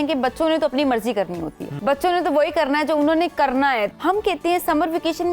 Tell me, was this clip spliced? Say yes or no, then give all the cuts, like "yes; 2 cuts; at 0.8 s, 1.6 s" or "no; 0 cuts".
yes; 2 cuts; at 1.7 s, 3.9 s